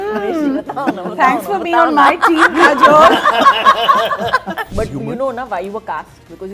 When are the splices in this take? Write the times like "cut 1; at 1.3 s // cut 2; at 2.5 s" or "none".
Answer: cut 1; at 4.7 s